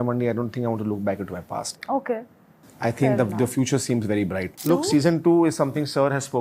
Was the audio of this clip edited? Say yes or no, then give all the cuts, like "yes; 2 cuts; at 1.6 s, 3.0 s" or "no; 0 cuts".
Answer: yes; 1 cut; at 4.5 s